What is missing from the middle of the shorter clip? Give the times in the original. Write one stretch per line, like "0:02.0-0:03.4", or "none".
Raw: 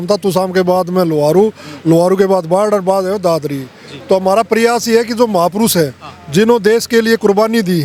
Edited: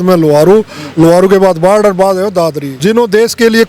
0:03.5-0:06.2